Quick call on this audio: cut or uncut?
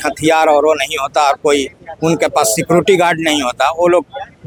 uncut